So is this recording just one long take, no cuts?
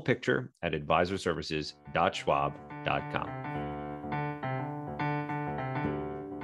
no; 1 cut; at 3.3 s

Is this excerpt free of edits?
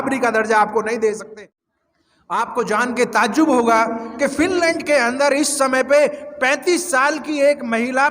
no; 1 cut; at 1.2 s

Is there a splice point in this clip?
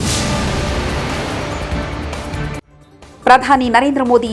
yes; 1 cut; at 2.7 s

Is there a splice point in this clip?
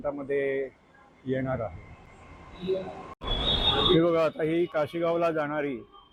no; 0 cuts

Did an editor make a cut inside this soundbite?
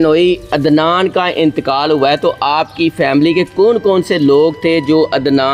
no; 0 cuts

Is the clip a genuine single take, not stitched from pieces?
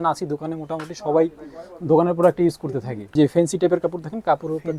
no; 1 cut; at 3.1 s

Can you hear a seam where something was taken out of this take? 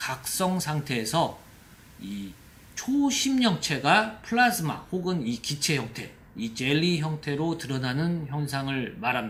no; 0 cuts

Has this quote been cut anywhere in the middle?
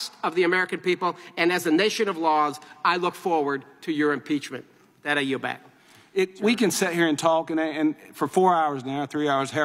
yes; 1 cut; at 5.8 s

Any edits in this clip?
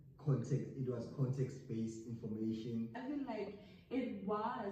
yes; 1 cut; at 3.0 s

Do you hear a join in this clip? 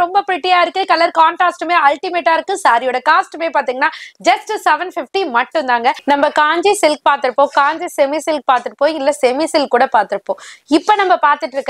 yes; 1 cut; at 6.0 s

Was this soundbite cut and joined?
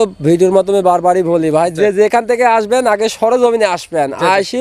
no; 0 cuts

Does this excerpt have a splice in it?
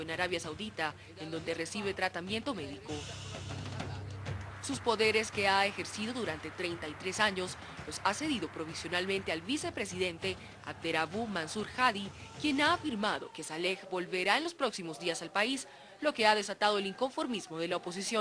no; 0 cuts

